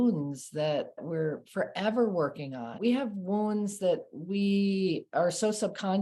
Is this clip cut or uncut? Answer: cut